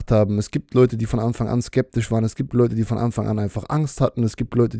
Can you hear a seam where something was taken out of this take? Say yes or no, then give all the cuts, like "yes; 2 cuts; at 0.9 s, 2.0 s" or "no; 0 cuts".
no; 0 cuts